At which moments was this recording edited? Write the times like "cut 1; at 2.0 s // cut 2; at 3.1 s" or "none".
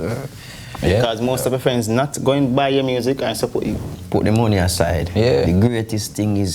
cut 1; at 3.8 s